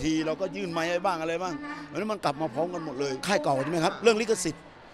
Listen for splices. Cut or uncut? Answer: cut